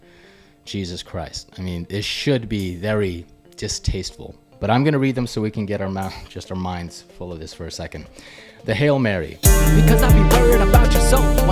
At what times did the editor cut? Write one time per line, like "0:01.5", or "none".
0:09.3